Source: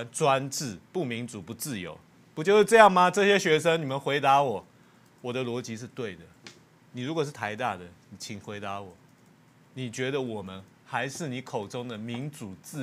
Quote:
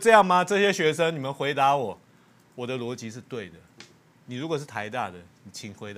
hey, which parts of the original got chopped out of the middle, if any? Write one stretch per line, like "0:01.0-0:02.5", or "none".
none